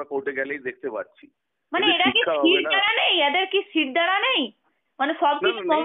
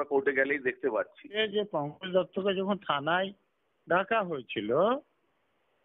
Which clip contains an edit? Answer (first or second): second